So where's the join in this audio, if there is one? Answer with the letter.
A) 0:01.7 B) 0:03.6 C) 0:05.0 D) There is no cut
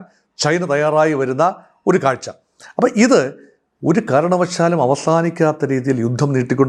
D